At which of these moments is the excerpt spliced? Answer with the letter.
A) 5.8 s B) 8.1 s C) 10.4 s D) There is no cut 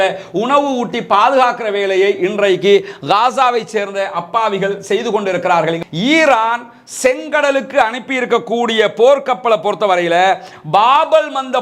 A